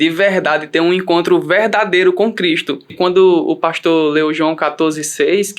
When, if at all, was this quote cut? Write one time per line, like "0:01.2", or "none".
0:02.9